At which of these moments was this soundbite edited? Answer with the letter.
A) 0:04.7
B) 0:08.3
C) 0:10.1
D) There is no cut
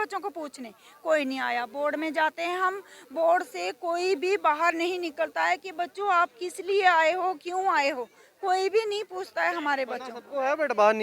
D